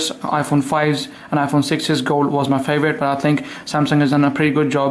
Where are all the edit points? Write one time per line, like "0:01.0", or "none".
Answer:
none